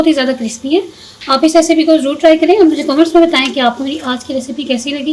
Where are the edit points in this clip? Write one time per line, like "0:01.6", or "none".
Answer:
none